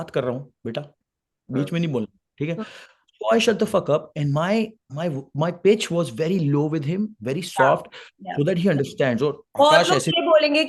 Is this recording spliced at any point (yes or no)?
no